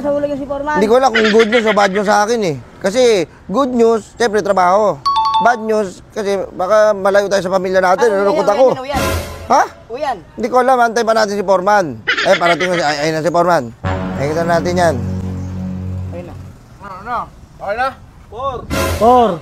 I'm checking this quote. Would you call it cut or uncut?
uncut